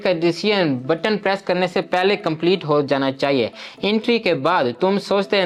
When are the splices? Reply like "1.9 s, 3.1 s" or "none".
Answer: none